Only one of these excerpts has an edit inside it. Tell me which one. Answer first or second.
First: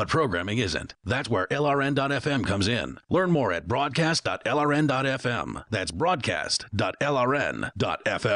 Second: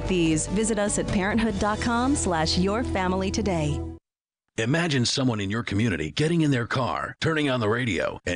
second